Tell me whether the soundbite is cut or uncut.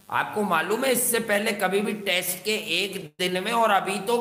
uncut